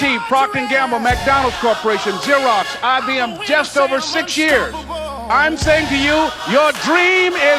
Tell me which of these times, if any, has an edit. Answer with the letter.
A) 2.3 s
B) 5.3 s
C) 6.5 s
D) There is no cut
B